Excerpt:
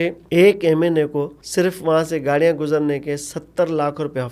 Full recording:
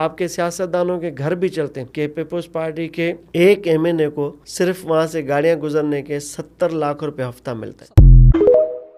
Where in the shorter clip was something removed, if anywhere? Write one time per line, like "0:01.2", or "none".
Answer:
none